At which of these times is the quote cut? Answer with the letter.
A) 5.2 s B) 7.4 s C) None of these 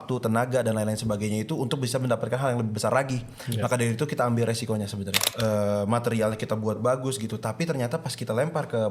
A